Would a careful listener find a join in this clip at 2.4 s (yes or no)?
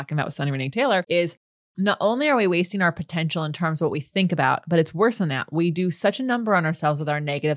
no